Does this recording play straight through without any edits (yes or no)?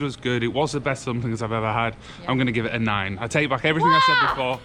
yes